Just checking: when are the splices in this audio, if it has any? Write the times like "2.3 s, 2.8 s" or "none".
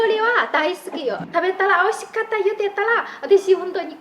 1.2 s